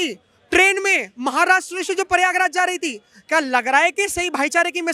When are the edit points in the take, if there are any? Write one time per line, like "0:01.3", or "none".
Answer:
none